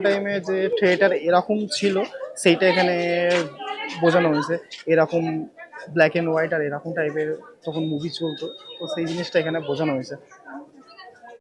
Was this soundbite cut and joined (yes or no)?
no